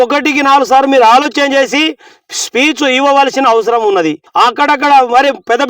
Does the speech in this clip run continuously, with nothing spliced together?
no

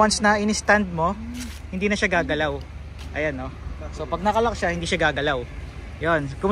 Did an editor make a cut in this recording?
no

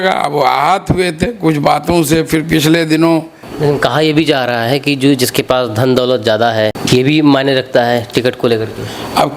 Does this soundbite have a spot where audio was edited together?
yes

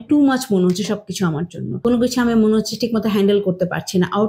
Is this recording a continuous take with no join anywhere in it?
no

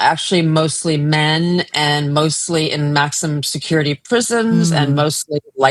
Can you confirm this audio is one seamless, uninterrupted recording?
yes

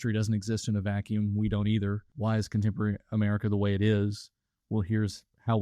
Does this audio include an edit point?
yes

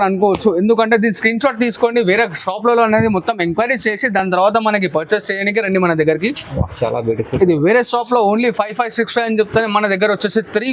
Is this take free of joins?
yes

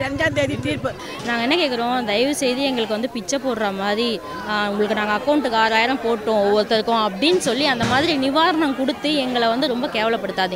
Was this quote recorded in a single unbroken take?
no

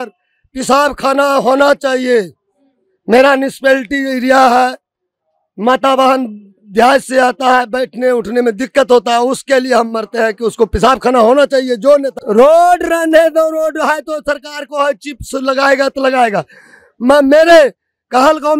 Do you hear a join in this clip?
yes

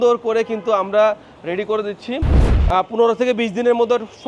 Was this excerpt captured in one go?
no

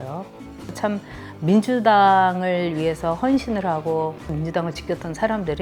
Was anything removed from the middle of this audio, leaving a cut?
yes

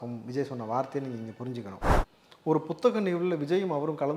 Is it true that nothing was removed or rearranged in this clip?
no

